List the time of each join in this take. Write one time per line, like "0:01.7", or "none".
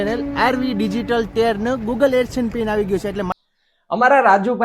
0:03.3

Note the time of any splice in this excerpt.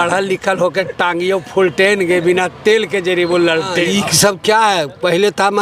0:03.8

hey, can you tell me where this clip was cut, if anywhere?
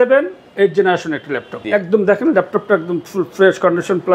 0:01.6

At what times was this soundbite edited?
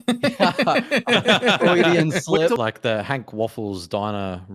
0:02.6

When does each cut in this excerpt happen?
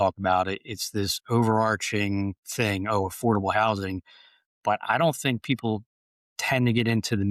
none

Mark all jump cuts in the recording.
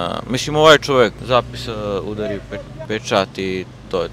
0:01.2

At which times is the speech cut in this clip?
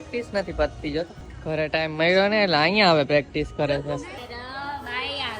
0:01.3
0:04.2

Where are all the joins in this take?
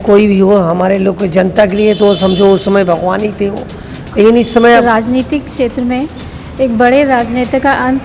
0:04.8

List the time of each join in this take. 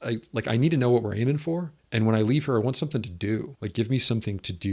0:01.8
0:03.6

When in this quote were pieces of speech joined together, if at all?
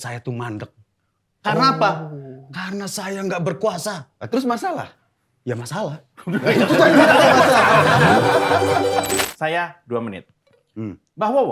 0:09.2

